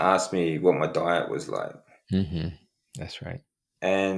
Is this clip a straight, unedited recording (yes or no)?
yes